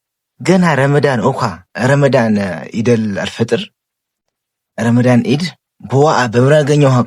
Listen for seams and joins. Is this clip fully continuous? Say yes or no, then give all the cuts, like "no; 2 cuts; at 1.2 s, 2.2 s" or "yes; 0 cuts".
no; 1 cut; at 2.6 s